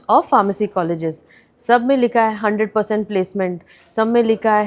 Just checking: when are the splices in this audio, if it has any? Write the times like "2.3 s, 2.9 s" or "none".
none